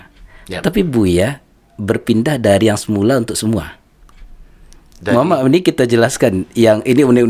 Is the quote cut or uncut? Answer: uncut